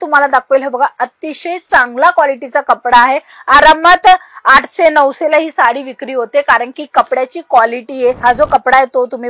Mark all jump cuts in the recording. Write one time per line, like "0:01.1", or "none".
0:08.2